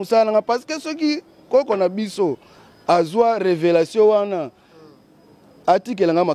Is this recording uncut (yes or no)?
yes